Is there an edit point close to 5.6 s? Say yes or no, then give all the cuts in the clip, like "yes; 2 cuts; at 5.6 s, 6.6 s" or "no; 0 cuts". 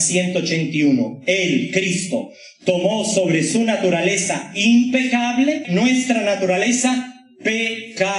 yes; 1 cut; at 5.6 s